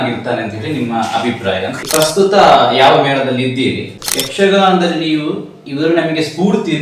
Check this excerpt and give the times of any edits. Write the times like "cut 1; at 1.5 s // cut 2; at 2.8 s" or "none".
cut 1; at 1.8 s // cut 2; at 3.9 s

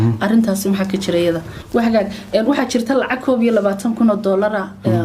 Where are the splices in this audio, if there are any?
cut 1; at 1.5 s

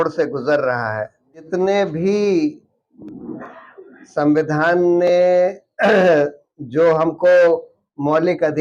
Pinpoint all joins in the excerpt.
cut 1; at 1.5 s

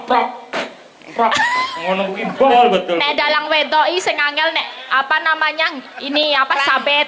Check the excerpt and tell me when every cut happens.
cut 1; at 2.5 s

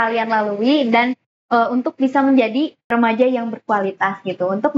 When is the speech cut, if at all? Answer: cut 1; at 2.9 s

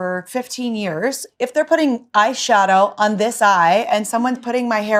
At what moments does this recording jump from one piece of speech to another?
none

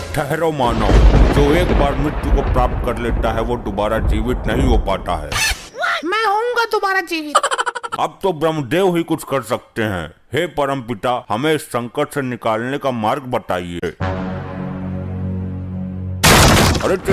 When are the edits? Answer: cut 1; at 7.8 s // cut 2; at 13.9 s

